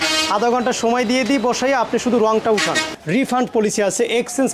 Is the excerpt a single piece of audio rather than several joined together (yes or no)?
no